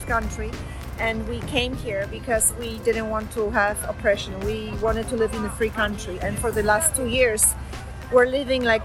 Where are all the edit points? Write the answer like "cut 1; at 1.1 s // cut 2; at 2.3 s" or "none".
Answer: none